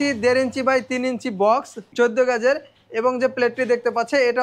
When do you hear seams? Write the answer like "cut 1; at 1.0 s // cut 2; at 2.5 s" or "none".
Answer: cut 1; at 1.8 s